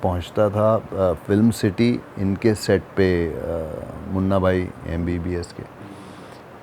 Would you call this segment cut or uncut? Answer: uncut